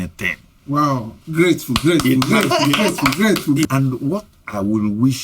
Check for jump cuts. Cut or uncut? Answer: cut